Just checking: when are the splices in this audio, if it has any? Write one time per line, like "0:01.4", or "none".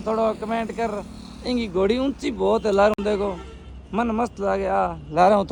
none